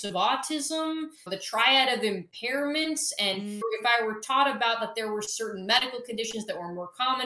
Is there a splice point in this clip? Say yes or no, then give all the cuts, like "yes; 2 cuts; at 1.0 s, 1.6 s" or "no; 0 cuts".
yes; 2 cuts; at 1.2 s, 3.6 s